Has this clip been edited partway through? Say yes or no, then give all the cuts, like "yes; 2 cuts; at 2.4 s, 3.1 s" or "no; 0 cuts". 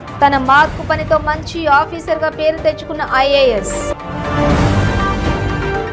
no; 0 cuts